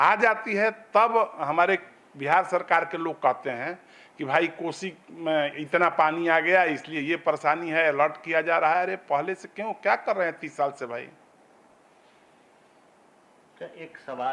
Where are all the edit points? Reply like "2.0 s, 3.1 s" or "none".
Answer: none